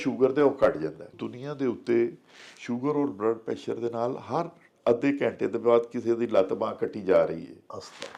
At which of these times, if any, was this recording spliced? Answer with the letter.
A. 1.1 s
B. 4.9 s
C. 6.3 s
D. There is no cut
A